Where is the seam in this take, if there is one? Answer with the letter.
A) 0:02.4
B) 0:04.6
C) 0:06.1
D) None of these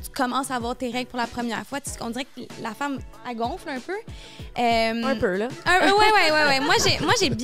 D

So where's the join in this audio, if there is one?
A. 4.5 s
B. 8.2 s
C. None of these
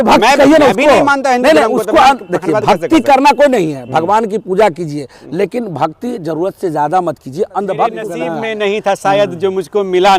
B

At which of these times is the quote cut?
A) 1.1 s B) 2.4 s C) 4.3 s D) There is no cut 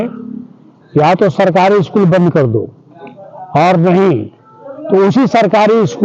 D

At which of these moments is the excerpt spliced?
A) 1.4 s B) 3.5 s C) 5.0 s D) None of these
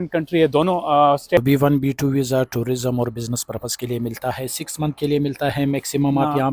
A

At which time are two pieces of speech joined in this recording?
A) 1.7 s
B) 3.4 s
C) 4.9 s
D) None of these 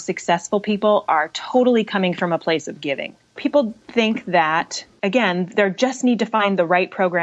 B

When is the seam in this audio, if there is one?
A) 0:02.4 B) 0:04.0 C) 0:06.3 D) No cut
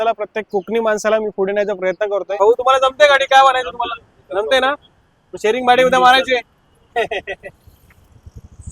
A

